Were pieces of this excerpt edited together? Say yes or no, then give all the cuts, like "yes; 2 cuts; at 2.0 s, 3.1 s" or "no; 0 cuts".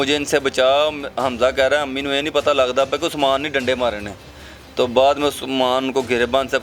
no; 0 cuts